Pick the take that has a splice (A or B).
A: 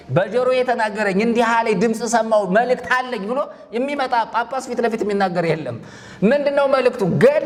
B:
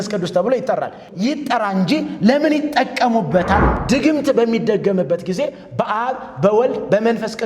B